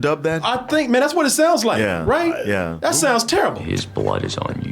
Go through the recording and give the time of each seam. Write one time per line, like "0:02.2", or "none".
0:03.6